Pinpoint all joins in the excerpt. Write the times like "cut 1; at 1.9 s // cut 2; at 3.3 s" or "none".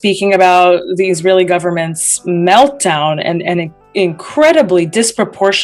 none